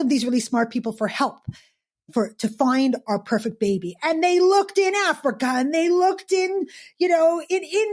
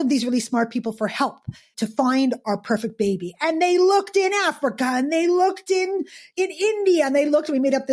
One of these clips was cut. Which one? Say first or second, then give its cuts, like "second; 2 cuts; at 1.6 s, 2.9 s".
second; 2 cuts; at 1.7 s, 6.3 s